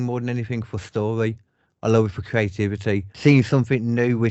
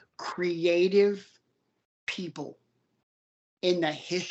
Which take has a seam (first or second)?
first